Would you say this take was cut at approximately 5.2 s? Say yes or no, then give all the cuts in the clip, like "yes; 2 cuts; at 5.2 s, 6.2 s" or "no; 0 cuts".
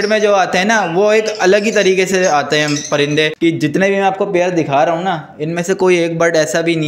no; 1 cut; at 3.3 s